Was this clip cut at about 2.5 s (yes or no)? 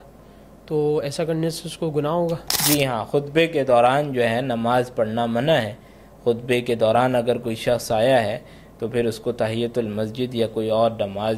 yes